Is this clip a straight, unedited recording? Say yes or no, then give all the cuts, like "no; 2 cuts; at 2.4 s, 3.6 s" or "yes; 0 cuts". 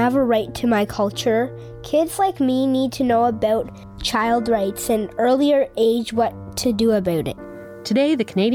yes; 0 cuts